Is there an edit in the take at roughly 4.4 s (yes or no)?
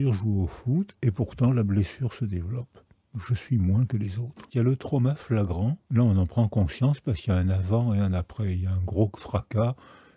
yes